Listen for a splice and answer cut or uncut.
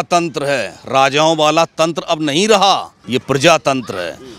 cut